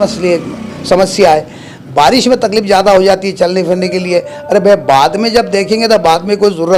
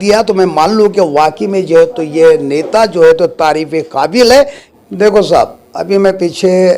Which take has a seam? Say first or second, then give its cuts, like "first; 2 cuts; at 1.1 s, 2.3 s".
second; 1 cut; at 4.6 s